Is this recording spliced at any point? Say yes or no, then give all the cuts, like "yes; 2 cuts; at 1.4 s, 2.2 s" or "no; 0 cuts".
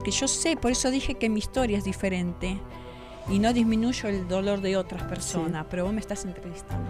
no; 0 cuts